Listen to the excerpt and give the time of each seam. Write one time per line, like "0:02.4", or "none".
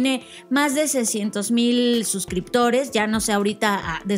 none